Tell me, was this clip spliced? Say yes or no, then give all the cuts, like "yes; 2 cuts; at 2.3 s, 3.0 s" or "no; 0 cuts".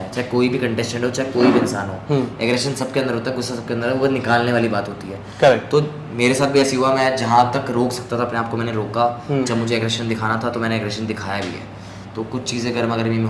no; 0 cuts